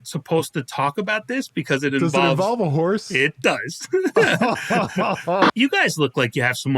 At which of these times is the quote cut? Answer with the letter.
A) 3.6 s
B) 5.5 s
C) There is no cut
B